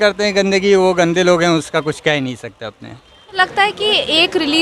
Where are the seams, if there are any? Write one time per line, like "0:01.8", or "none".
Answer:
0:03.3